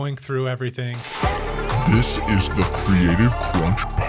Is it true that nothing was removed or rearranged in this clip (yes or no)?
no